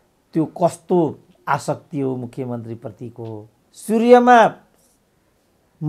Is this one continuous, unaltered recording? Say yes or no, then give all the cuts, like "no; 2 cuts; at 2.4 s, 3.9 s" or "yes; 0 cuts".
no; 1 cut; at 3.8 s